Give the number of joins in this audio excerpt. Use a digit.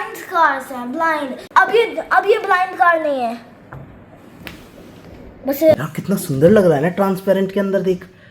2